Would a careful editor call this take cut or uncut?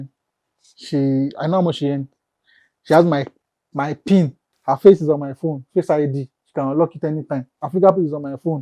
cut